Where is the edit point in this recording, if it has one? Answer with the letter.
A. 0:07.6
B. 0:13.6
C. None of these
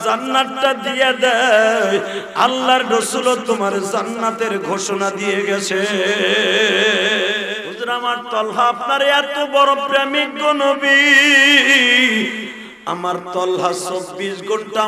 A